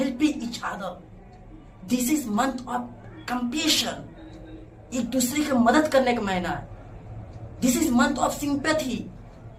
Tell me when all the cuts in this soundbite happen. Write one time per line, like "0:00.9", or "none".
none